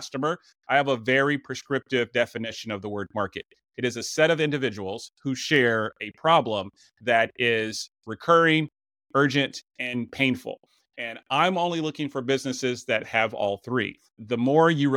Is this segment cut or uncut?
uncut